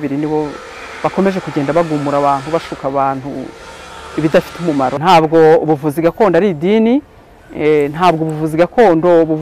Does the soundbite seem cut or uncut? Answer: cut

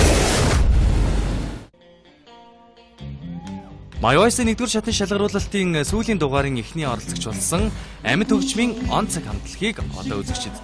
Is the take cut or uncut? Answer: uncut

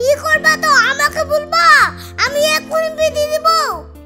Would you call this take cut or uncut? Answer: uncut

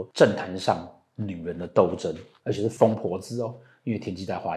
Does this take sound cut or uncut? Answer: cut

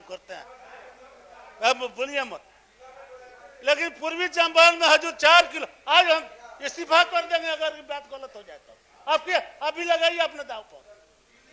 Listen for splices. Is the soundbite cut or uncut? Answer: uncut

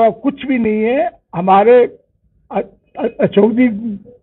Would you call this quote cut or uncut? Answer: uncut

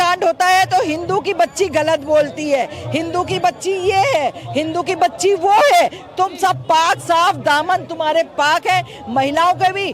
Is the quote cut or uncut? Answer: uncut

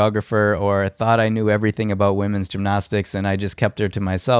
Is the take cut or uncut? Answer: uncut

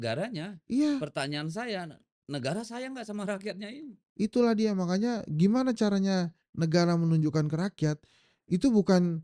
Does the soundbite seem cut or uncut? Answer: uncut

